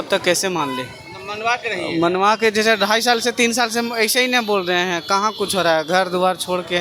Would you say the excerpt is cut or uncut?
uncut